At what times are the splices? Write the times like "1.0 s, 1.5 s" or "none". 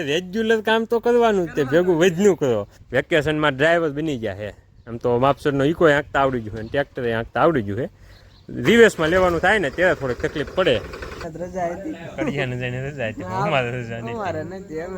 2.8 s, 11.2 s